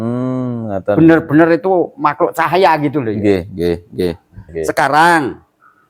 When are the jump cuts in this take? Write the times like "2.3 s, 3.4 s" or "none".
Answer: 4.5 s